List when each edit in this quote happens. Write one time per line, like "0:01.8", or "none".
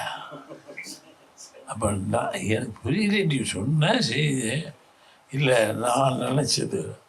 none

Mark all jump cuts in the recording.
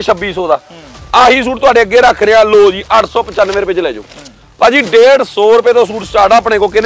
none

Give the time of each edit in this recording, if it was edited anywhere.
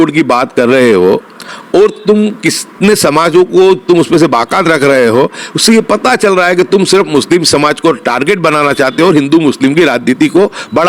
none

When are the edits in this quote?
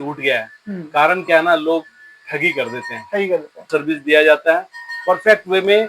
0:03.7

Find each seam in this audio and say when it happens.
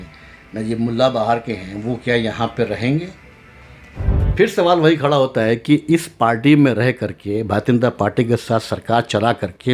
0:04.1

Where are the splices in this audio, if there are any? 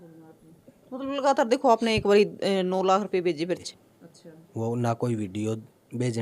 0:03.7

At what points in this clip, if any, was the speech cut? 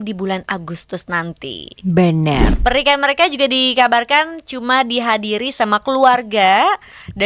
0:02.5

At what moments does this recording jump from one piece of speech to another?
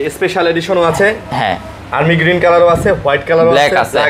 none

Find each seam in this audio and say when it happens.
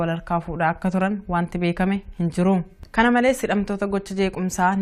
none

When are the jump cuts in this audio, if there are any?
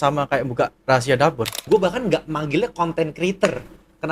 0:01.6

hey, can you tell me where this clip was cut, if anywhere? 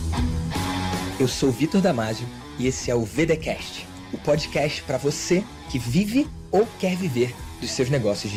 none

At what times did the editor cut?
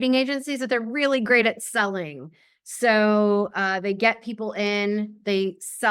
none

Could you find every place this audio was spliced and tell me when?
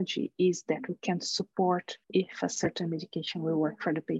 0:02.0

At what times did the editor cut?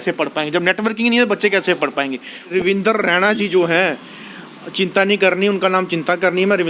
0:02.5

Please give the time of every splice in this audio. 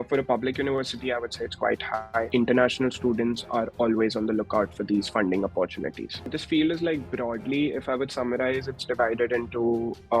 0:02.3
0:06.4

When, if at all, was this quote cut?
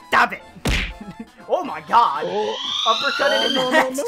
none

